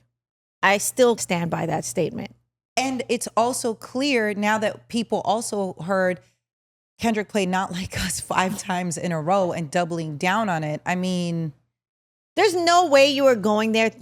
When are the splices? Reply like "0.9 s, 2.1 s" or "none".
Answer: 1.2 s